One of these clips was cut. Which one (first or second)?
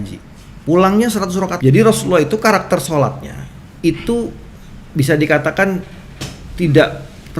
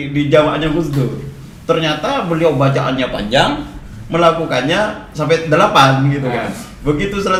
first